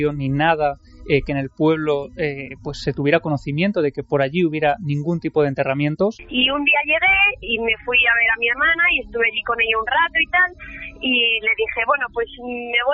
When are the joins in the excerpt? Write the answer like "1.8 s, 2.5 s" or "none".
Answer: 6.2 s